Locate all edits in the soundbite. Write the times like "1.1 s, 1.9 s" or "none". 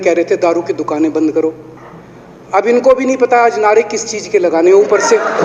none

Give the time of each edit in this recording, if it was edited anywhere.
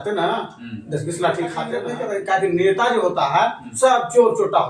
1.8 s

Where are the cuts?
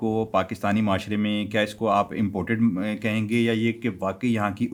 none

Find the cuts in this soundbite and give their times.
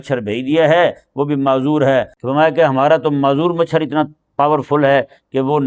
2.2 s

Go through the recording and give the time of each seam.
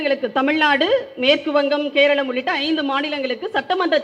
none

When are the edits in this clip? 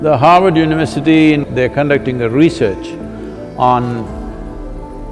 1.4 s

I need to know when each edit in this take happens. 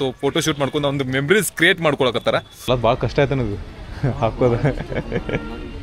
2.5 s

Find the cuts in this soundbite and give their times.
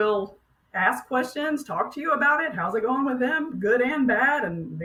none

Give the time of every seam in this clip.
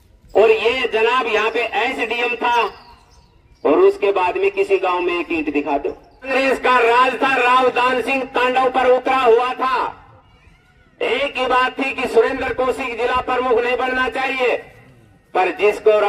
6.3 s

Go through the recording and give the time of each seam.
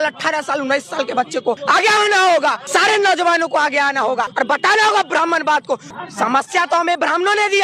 1.6 s, 2.6 s, 4.3 s, 5.9 s

